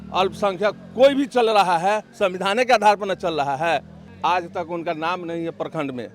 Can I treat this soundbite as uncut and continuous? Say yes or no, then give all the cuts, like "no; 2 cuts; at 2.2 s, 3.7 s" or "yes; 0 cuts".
no; 1 cut; at 4.0 s